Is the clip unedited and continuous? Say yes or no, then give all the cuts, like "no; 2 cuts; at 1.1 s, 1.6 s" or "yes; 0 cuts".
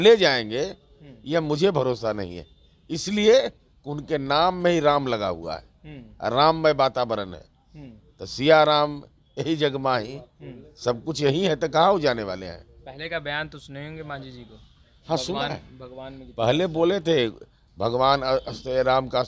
yes; 0 cuts